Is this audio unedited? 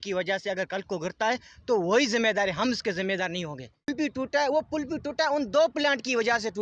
no; 1 cut; at 3.9 s

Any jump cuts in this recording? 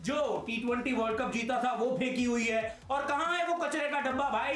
no; 0 cuts

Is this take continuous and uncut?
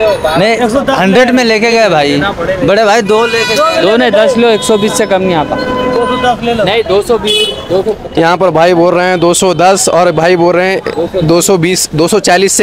yes; 0 cuts

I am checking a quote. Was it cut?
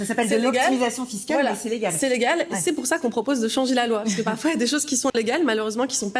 yes; 1 cut; at 5.1 s

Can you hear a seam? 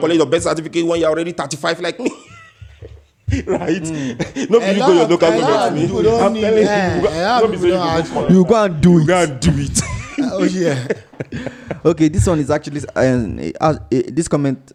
no; 0 cuts

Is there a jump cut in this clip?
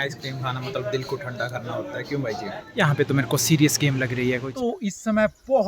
yes; 2 cuts; at 2.7 s, 4.5 s

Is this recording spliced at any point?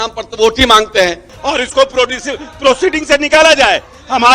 yes; 1 cut; at 1.3 s

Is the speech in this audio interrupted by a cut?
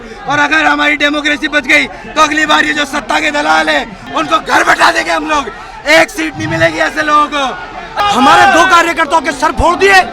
yes; 2 cuts; at 4.0 s, 7.8 s

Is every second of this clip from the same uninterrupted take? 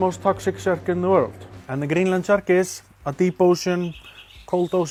yes; 0 cuts

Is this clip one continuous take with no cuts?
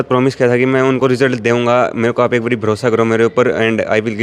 yes; 0 cuts

